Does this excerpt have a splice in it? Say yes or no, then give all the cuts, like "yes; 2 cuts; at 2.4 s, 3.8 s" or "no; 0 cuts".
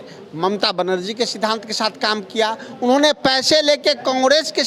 no; 0 cuts